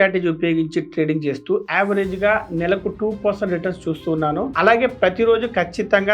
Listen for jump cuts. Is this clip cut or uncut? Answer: uncut